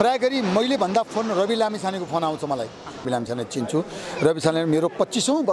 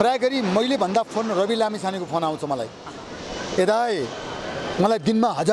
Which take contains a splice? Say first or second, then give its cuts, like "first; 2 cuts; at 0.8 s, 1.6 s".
first; 1 cut; at 3.1 s